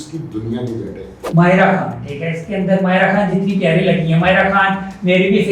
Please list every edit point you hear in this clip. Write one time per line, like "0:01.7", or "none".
0:01.2